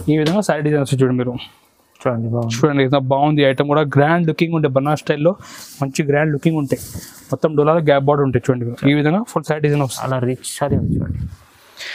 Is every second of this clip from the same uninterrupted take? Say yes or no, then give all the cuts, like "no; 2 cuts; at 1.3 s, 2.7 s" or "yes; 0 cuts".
no; 1 cut; at 10.0 s